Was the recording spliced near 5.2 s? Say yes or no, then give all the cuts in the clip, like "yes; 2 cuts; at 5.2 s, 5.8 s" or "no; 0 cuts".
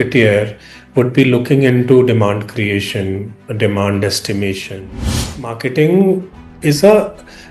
yes; 1 cut; at 5.2 s